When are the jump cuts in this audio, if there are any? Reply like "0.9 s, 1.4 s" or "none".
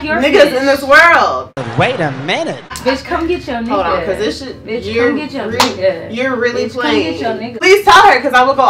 2.8 s, 7.5 s